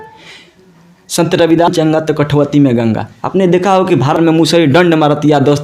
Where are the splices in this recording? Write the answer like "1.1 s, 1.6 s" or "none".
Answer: 1.7 s, 4.2 s